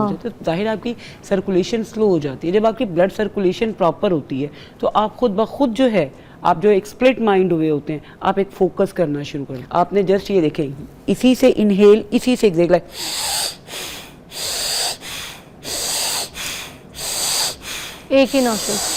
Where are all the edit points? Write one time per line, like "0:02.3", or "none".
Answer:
0:09.5

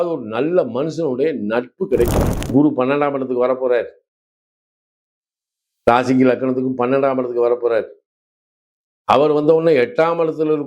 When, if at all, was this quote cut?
0:02.5

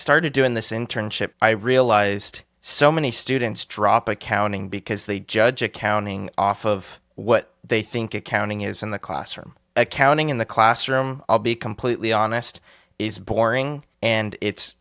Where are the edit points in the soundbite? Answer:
0:13.8

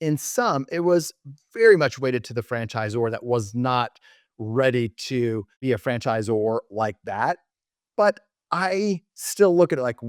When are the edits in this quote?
0:05.5

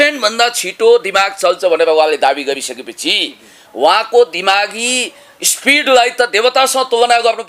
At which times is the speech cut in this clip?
none

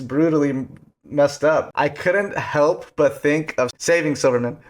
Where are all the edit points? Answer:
0:01.7
0:03.8

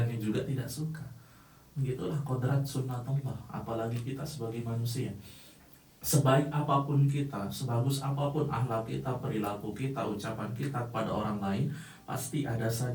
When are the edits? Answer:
none

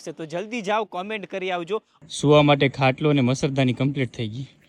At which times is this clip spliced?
0:02.0

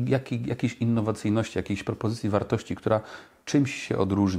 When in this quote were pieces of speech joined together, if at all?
none

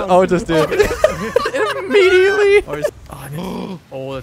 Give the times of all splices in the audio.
0:02.9

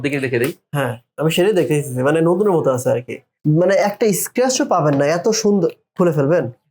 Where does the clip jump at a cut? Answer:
0:03.3

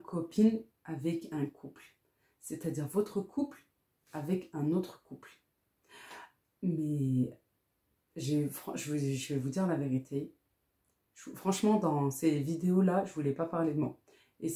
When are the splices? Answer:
none

